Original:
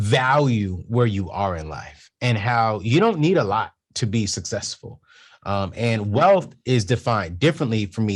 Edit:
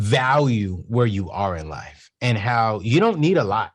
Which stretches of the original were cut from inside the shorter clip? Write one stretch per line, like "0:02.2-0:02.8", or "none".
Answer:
none